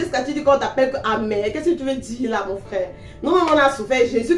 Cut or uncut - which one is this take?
uncut